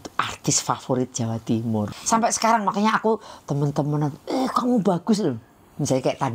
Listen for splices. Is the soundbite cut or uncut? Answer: cut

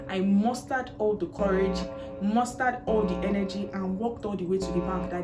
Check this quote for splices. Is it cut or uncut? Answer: uncut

